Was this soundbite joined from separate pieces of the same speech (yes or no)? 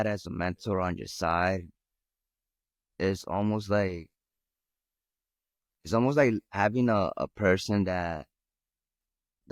no